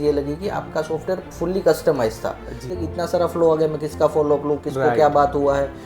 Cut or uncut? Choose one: cut